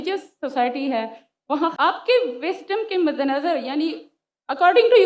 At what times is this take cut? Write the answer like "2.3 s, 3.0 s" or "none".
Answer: 1.7 s